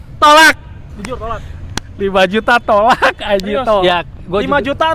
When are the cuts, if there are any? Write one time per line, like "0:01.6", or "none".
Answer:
0:03.8